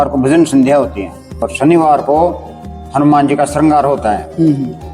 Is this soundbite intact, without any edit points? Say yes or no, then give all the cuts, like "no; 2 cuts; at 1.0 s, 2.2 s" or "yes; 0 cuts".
no; 1 cut; at 1.3 s